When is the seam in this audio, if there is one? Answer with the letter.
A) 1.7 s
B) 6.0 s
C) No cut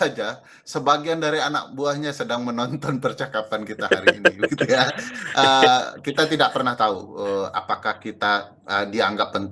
C